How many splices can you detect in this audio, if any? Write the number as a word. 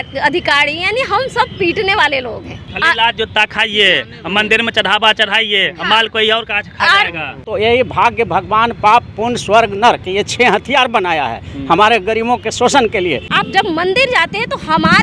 three